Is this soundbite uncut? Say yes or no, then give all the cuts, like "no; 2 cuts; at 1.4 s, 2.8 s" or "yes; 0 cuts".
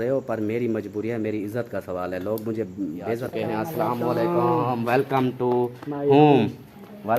no; 1 cut; at 3.3 s